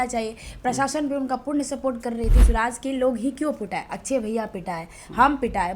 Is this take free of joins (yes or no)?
no